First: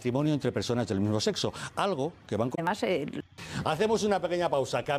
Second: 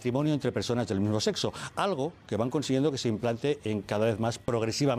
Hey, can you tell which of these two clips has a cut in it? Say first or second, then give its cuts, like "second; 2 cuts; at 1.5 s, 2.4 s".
second; 1 cut; at 2.5 s